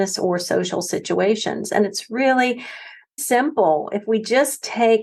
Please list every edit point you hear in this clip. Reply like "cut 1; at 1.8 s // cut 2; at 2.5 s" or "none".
cut 1; at 3.1 s